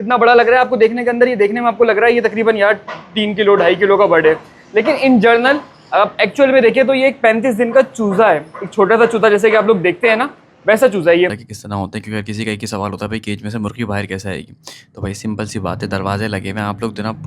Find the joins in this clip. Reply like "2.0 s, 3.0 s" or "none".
11.4 s